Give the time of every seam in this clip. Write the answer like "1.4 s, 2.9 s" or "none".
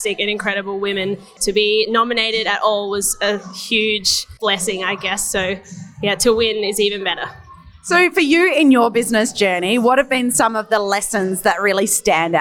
none